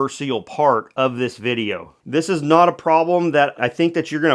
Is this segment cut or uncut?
cut